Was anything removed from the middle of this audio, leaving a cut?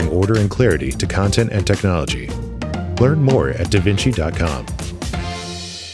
yes; 1 cut; at 4.7 s

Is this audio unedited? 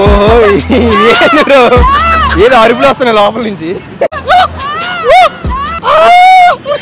no; 1 cut; at 4.1 s

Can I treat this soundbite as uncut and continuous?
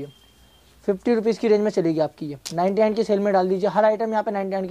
yes; 0 cuts

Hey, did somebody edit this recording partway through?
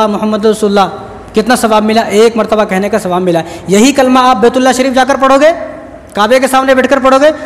no; 0 cuts

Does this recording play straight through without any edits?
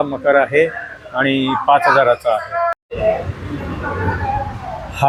yes; 0 cuts

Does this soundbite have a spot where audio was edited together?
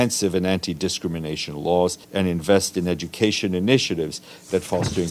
yes; 1 cut; at 2.0 s

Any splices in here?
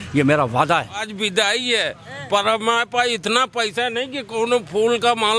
yes; 1 cut; at 1.1 s

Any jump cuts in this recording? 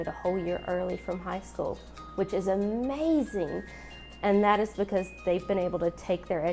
no; 0 cuts

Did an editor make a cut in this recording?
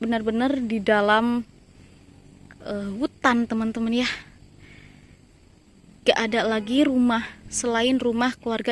no; 0 cuts

